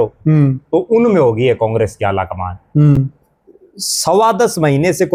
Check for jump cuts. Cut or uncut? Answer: uncut